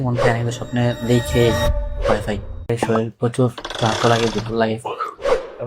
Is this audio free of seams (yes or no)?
no